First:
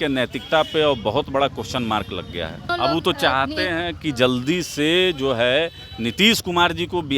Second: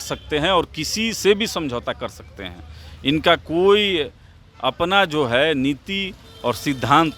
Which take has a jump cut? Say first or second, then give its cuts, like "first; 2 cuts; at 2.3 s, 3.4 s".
first; 1 cut; at 2.7 s